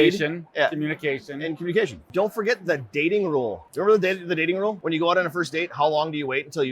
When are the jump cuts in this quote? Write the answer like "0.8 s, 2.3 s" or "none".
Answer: 2.0 s, 3.6 s, 4.8 s